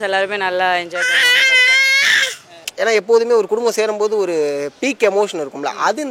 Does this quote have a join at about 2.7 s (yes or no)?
yes